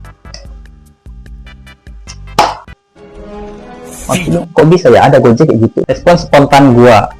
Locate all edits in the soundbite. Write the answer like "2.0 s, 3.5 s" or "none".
5.9 s